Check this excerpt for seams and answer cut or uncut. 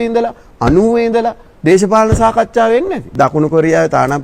cut